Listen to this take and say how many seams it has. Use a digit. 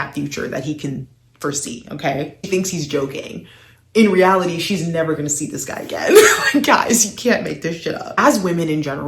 2